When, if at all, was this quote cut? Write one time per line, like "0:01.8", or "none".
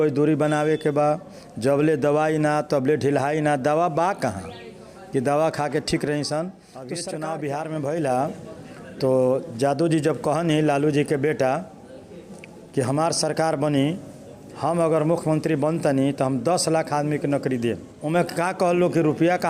0:07.0
0:17.9